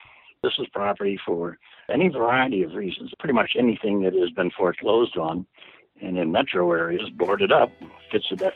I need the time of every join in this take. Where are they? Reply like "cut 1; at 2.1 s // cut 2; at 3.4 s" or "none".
cut 1; at 3.1 s